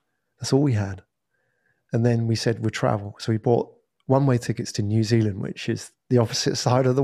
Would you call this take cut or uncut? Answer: uncut